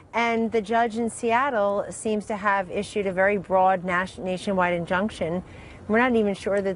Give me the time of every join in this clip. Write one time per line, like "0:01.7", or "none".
0:03.1